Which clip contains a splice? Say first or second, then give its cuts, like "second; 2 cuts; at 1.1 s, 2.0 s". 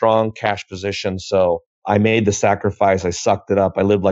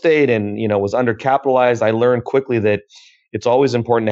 first; 1 cut; at 1.7 s